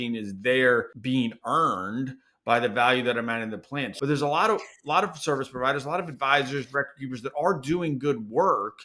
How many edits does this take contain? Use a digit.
2